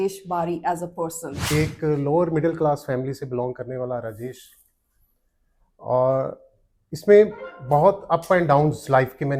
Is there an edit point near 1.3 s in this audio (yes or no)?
yes